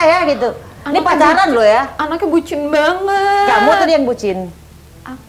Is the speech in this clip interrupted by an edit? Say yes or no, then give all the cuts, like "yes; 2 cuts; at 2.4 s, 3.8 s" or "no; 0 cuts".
no; 0 cuts